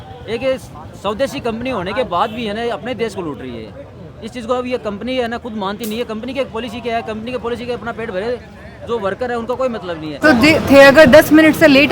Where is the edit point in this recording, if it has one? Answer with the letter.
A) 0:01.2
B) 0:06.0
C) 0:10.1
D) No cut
C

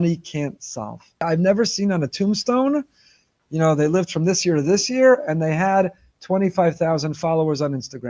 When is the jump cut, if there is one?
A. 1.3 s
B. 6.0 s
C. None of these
A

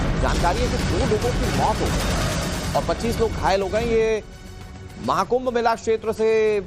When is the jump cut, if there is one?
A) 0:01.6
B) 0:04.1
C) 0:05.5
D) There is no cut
B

